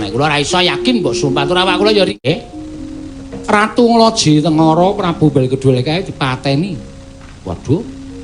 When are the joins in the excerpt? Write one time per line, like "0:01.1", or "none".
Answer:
0:02.3

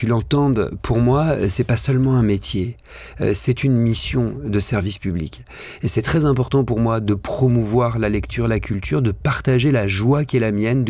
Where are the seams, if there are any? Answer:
none

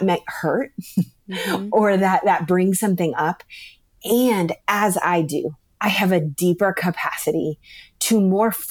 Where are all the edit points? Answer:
none

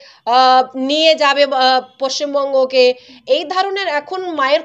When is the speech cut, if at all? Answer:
none

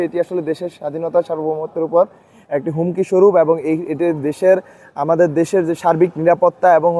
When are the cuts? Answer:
none

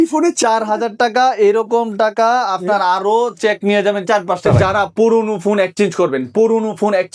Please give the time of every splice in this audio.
0:04.6

